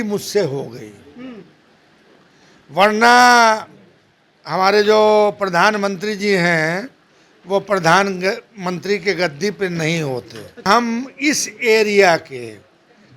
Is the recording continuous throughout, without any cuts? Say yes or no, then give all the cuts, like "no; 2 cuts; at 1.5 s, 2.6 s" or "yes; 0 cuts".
no; 1 cut; at 10.7 s